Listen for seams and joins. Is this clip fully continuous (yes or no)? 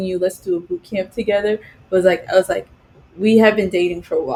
yes